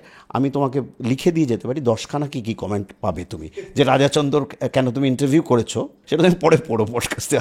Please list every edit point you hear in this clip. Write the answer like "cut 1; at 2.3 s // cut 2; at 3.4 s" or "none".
cut 1; at 6.0 s